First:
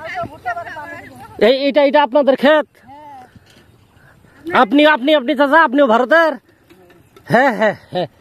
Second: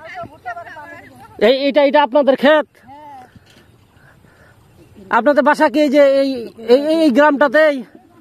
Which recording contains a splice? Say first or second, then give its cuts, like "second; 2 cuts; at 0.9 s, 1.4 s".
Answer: first; 1 cut; at 4.4 s